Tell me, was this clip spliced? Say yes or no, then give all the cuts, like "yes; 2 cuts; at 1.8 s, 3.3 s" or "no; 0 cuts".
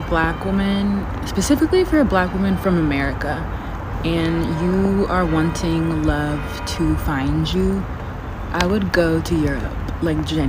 no; 0 cuts